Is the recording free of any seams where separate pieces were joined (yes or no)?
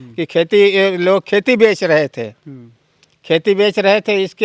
yes